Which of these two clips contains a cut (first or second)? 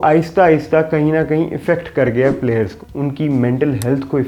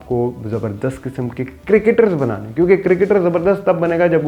first